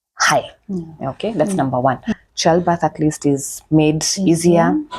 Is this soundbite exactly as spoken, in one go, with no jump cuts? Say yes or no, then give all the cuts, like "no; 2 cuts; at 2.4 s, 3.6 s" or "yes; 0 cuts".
no; 1 cut; at 2.1 s